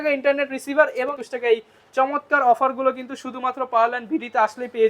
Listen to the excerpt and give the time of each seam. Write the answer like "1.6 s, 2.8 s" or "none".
1.2 s